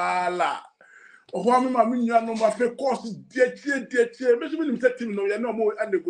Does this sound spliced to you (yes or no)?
no